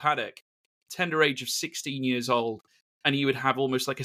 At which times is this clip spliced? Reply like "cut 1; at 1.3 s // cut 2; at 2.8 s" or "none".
none